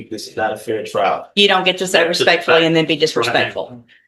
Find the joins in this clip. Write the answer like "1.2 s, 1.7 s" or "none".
none